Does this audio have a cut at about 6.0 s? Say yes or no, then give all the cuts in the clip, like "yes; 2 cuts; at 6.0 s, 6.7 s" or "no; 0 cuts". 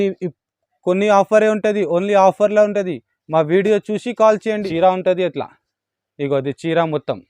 no; 1 cut; at 4.5 s